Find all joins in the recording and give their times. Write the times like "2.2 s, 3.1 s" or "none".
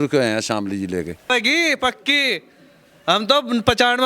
1.3 s

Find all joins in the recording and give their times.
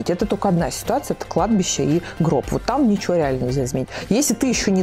none

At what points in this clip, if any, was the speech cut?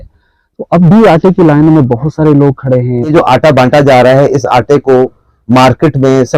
3.1 s

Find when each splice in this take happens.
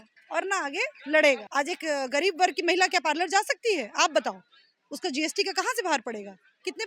1.4 s

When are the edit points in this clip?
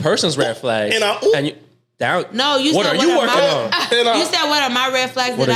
none

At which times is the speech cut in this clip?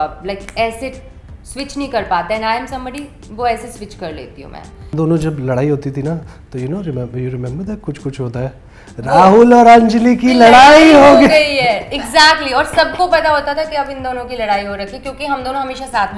4.9 s

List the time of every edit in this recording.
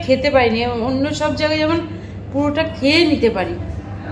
none

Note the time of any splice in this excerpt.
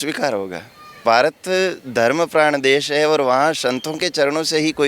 1.0 s

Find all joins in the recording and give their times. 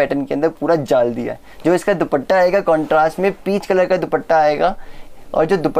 none

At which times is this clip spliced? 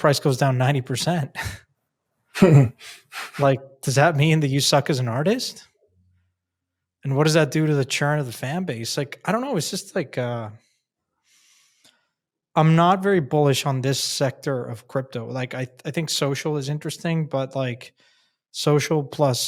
none

